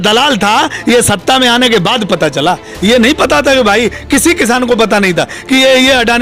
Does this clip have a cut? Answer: no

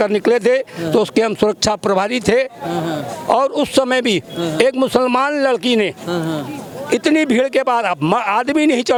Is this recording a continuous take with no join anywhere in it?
yes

